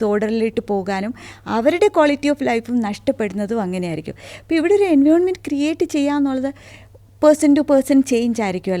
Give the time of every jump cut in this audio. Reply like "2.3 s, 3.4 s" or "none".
none